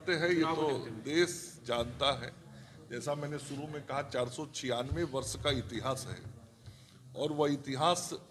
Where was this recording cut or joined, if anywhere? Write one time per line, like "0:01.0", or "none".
none